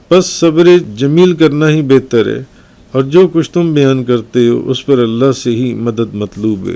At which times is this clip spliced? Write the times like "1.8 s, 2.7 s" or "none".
0.9 s